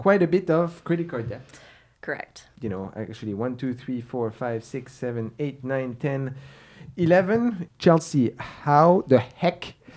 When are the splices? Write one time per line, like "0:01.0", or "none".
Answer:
0:07.7